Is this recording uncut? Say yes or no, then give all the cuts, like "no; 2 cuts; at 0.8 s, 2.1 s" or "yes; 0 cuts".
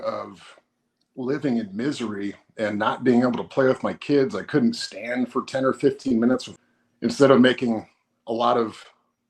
no; 1 cut; at 6.5 s